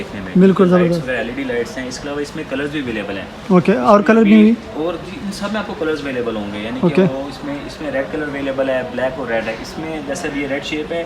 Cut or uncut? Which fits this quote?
uncut